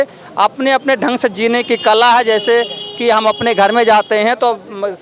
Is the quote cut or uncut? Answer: uncut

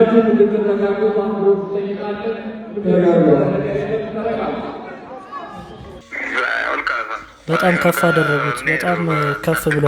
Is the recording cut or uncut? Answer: cut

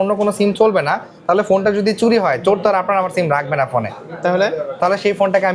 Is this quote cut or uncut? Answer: uncut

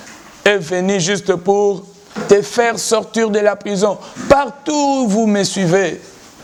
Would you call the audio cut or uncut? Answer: uncut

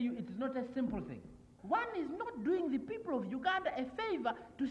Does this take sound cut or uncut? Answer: cut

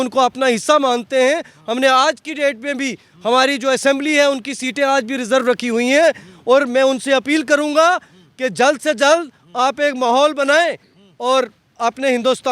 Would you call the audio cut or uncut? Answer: uncut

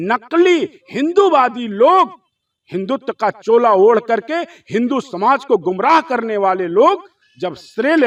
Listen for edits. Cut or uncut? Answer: uncut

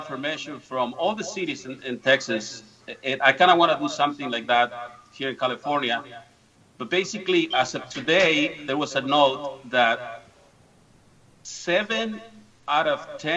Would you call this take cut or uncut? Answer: uncut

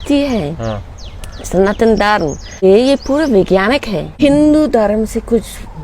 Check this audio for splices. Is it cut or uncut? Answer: cut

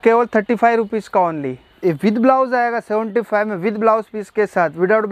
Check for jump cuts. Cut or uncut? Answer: cut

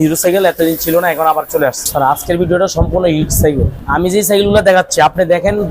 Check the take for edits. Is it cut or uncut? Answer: cut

